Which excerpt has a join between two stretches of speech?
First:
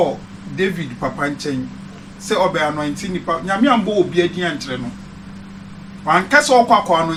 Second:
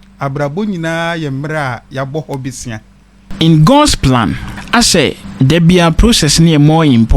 second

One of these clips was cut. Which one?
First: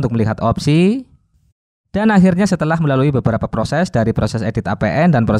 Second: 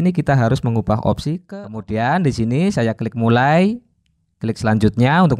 second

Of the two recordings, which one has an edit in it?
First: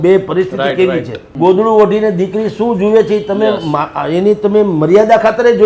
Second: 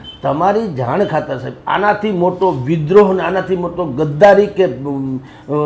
first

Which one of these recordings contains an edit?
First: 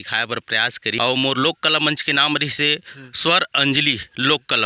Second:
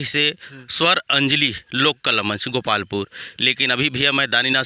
first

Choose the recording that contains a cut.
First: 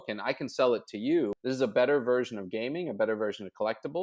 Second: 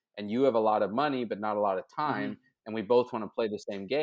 first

